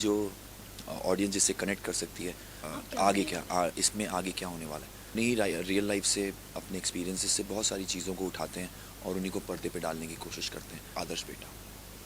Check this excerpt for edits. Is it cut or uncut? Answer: cut